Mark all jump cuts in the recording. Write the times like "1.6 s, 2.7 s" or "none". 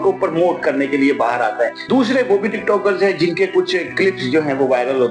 1.8 s